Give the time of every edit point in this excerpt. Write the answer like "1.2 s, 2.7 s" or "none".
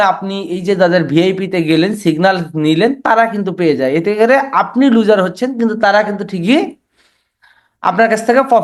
none